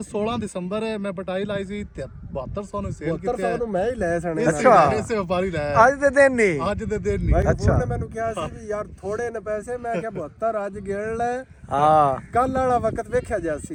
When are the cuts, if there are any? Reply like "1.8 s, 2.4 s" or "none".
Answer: none